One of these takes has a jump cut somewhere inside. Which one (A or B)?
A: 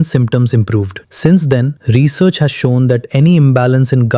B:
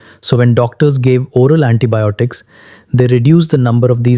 A